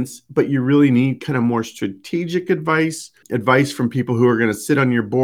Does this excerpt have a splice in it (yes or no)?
yes